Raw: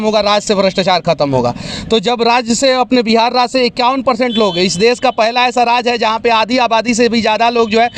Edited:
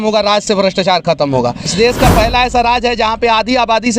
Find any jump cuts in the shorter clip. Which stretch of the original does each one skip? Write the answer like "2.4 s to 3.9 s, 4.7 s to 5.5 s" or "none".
1.7 s to 4.7 s